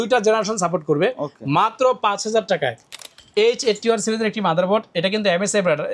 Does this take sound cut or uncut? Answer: cut